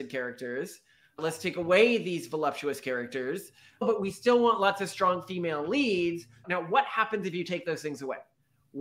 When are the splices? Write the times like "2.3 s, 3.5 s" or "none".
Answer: 3.8 s, 6.4 s